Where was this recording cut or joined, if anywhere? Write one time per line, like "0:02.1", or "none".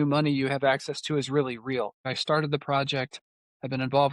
0:02.1